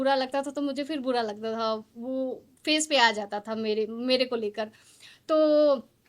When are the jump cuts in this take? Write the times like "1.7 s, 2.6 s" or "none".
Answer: none